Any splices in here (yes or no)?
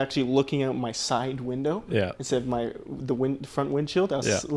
no